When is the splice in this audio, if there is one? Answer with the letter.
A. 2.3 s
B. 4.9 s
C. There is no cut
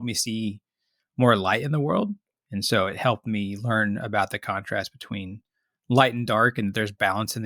A